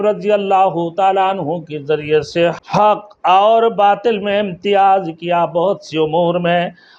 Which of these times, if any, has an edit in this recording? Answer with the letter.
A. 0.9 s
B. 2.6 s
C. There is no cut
B